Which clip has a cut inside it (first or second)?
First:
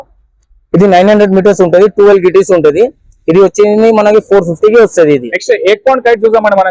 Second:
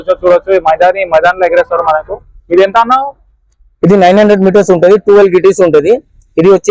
first